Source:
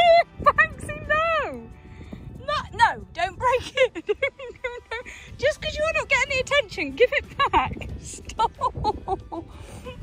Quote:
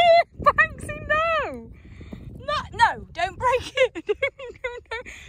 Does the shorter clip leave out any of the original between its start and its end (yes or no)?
no